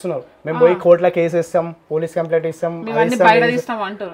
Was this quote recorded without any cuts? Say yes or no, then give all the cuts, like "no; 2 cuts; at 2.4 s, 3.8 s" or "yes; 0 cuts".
yes; 0 cuts